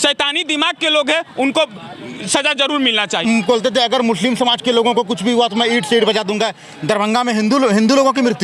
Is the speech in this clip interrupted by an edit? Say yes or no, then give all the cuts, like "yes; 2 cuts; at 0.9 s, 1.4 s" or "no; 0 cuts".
yes; 1 cut; at 3.2 s